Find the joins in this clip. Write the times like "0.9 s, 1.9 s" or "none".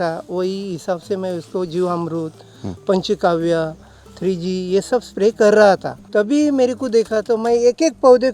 6.0 s